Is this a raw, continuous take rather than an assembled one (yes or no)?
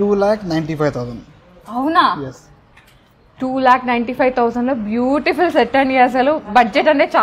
yes